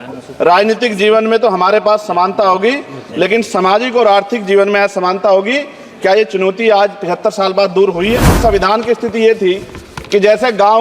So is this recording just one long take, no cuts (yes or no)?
no